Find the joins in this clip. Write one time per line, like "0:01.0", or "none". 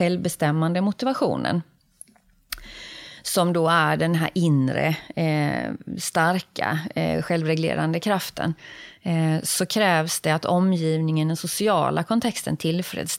none

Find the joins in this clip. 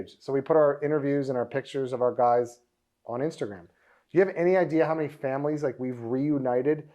none

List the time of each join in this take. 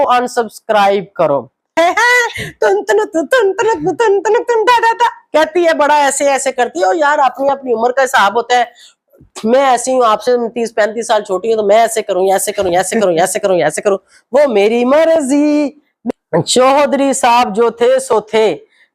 0:01.7
0:15.9

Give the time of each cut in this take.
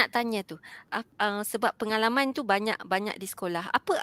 0:00.9

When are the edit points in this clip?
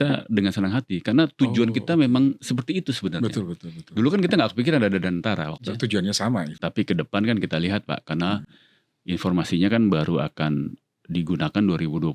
0:05.6
0:06.5

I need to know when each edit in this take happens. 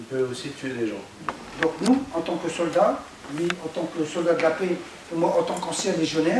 0:01.1

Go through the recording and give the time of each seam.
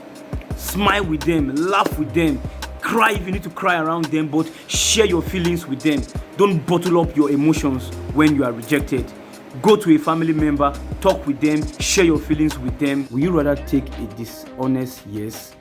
0:13.0

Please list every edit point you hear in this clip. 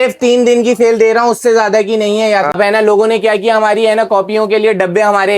0:02.5

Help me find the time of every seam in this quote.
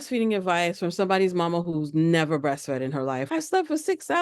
0:03.2

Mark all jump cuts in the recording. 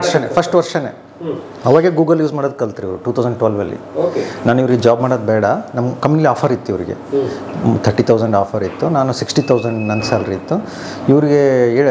none

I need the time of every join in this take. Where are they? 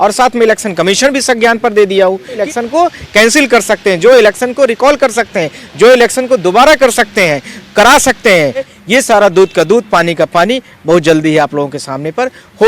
0:02.4
0:08.7

